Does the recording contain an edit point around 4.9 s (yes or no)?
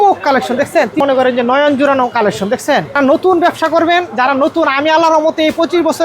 no